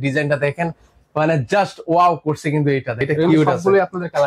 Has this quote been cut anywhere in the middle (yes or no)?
yes